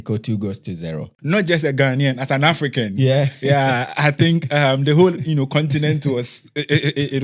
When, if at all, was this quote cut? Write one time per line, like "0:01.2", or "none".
0:01.1